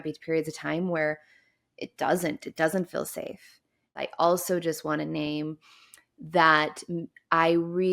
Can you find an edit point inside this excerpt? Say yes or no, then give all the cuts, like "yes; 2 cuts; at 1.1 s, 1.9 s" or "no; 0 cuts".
yes; 1 cut; at 3.9 s